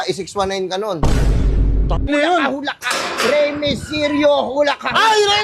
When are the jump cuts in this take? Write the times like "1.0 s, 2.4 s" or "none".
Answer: 2.1 s